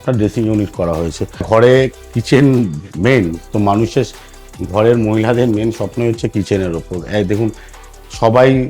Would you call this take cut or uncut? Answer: cut